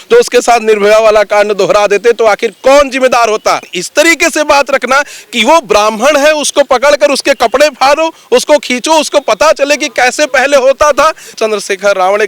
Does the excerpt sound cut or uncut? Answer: cut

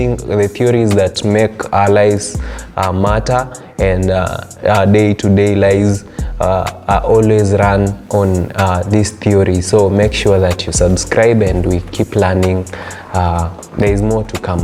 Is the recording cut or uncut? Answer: uncut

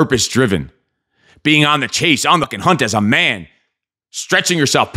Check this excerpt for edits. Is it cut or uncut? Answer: cut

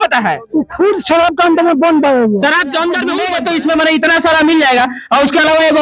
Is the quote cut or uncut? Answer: cut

